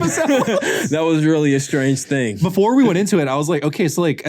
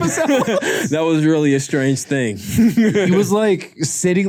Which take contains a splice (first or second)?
first